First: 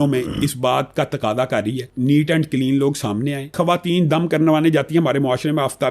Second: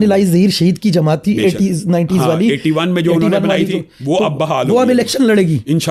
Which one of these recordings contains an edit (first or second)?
first